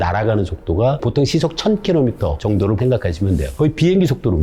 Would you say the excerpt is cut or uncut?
cut